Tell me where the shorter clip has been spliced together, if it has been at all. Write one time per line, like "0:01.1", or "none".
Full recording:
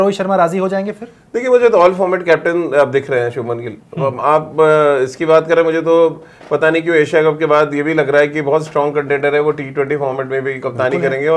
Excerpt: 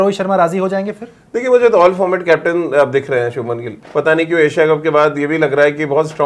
0:03.8